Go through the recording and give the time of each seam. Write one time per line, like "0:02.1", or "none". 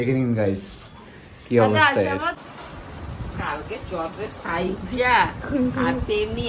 0:02.3